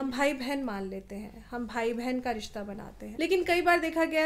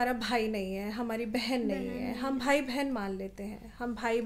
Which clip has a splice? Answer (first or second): first